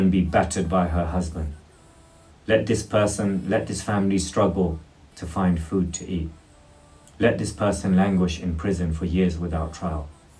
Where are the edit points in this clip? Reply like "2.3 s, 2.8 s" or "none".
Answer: none